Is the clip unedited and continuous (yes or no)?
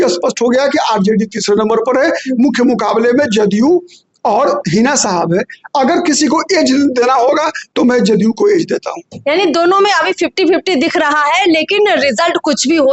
yes